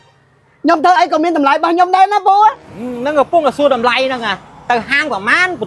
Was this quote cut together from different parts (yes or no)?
no